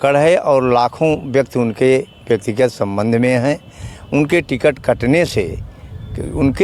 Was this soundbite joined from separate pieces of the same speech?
no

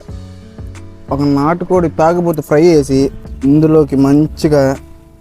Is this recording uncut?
no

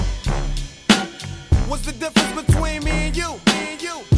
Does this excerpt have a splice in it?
yes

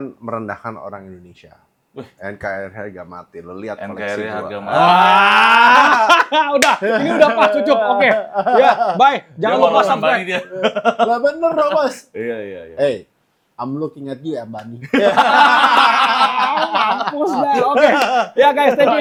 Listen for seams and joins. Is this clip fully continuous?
yes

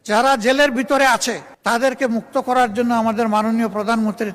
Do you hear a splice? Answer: yes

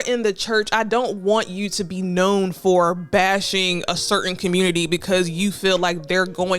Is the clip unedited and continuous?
yes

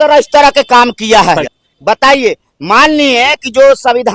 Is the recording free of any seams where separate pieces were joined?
yes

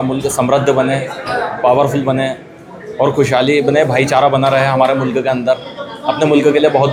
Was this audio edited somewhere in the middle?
no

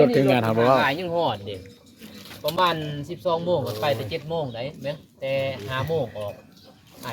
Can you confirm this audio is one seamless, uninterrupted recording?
yes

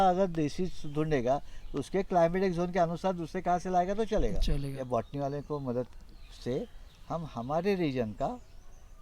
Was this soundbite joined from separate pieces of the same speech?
yes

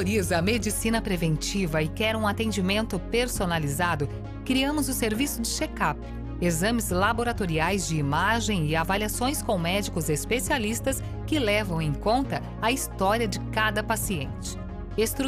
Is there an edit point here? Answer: no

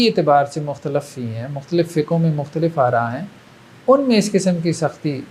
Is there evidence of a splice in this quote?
no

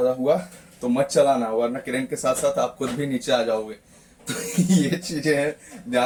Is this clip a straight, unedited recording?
yes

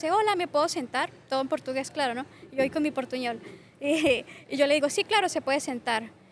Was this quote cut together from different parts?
no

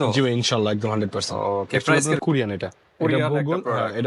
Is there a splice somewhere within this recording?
yes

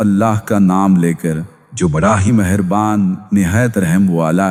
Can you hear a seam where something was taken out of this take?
no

